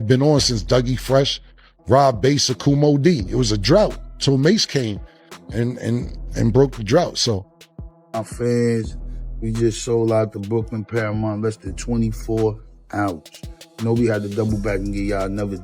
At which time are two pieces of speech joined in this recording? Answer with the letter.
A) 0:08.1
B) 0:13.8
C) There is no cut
A